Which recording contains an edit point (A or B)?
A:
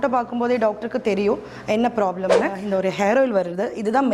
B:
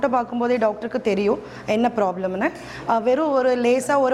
A